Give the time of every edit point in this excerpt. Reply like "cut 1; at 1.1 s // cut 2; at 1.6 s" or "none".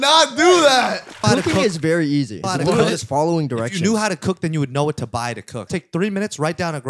cut 1; at 1.2 s // cut 2; at 2.4 s // cut 3; at 5.7 s